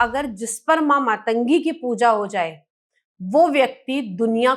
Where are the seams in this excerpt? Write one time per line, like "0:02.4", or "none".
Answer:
none